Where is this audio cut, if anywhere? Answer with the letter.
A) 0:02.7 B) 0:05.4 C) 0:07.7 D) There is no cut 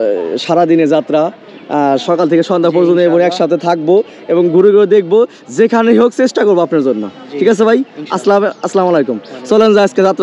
D